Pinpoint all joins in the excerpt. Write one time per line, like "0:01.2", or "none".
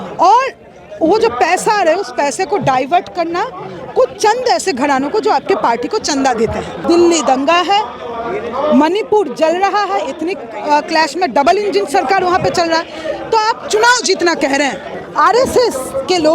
0:06.8
0:15.0